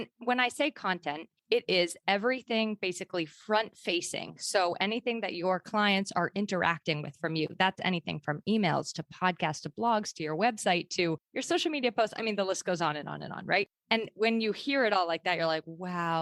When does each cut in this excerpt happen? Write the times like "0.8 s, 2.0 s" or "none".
none